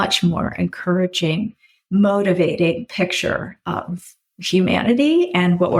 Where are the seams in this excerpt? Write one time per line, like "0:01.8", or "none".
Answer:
none